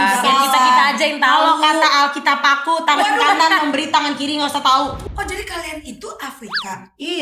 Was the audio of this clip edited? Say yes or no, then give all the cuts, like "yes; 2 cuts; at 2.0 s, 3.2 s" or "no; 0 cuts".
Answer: yes; 1 cut; at 5.0 s